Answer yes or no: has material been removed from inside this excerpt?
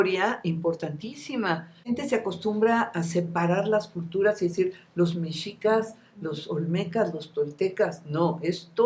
yes